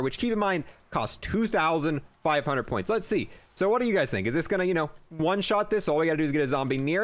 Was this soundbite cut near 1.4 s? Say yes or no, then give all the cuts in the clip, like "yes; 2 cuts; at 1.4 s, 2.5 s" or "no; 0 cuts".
no; 0 cuts